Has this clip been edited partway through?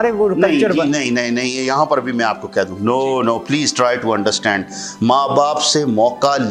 no; 0 cuts

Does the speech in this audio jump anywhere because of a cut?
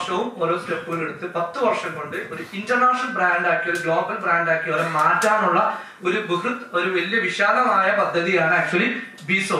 no; 0 cuts

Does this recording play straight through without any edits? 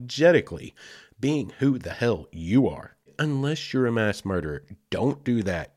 no; 1 cut; at 3.1 s

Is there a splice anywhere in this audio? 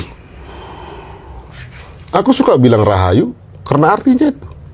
yes; 1 cut; at 1.5 s

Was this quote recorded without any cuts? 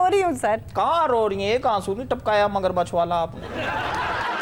yes; 0 cuts

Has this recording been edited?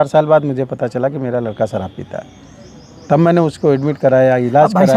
no; 0 cuts

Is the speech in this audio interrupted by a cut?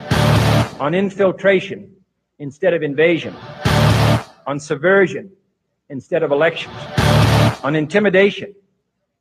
no; 0 cuts

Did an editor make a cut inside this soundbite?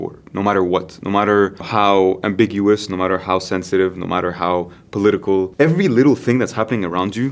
yes; 2 cuts; at 1.6 s, 5.5 s

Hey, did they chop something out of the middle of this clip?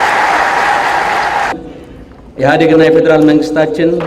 yes; 1 cut; at 1.5 s

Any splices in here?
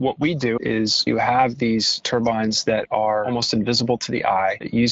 yes; 3 cuts; at 0.9 s, 2.0 s, 3.3 s

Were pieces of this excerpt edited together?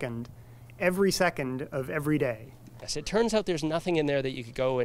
yes; 1 cut; at 2.9 s

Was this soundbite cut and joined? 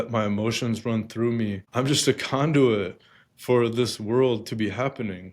yes; 1 cut; at 1.6 s

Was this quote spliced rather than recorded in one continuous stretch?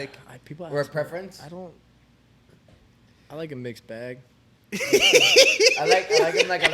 no; 0 cuts

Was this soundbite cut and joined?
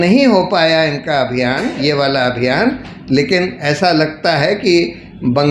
no; 0 cuts

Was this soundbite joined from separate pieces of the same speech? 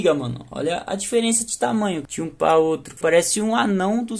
yes; 1 cut; at 2.9 s

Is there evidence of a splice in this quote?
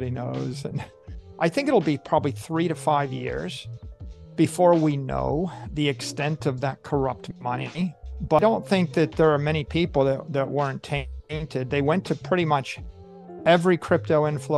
yes; 2 cuts; at 1.2 s, 8.4 s

